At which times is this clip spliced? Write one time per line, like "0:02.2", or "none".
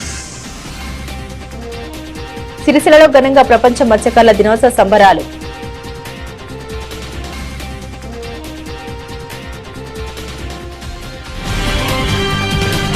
0:12.0

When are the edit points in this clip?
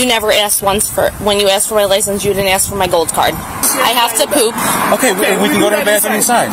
0:03.6

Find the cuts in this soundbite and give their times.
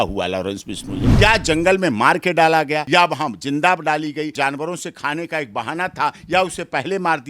0:01.1
0:02.8
0:04.3

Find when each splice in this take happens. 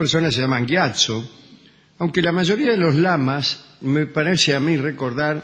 0:01.7

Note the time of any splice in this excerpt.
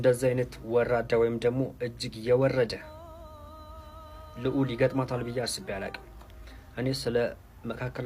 none

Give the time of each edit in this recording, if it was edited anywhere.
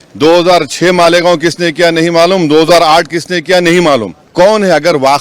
0:04.2

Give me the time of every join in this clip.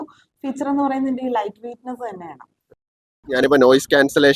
0:02.9

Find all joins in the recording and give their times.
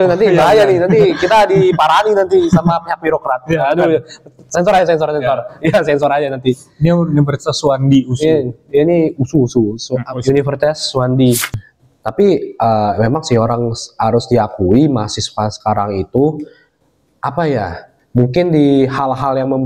0:11.5

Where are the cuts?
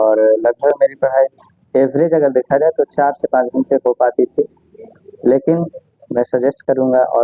none

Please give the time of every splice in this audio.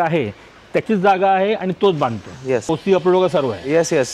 0:02.7

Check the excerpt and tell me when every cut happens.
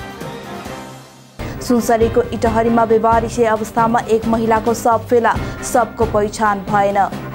none

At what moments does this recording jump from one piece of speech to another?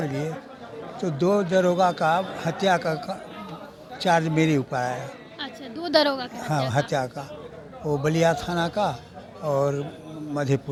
none

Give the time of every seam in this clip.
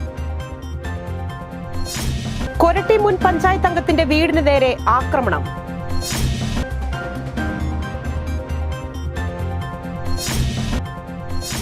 0:02.4

